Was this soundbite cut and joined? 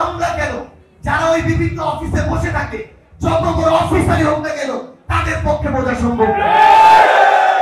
no; 0 cuts

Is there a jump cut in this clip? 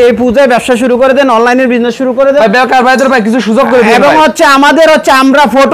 no; 0 cuts

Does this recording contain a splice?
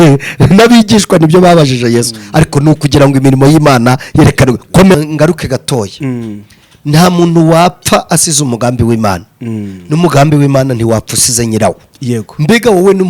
yes; 1 cut; at 4.9 s

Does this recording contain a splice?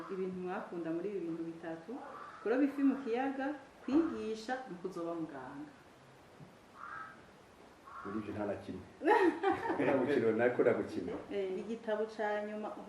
yes; 2 cuts; at 9.9 s, 11.5 s

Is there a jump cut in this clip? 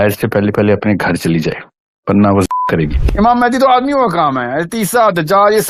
yes; 1 cut; at 3.0 s

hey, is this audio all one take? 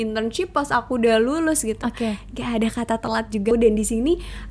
no; 1 cut; at 3.5 s

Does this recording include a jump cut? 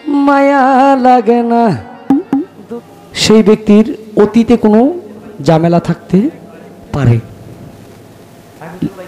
yes; 1 cut; at 2.5 s

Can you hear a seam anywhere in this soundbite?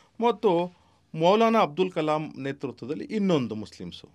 no; 0 cuts

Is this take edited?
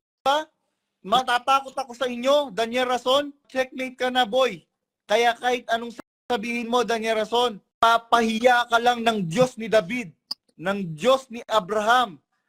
yes; 2 cuts; at 3.5 s, 7.6 s

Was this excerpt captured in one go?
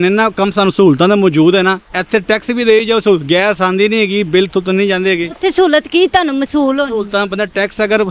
yes; 0 cuts

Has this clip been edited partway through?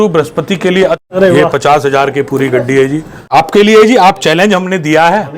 yes; 2 cuts; at 1.0 s, 3.2 s

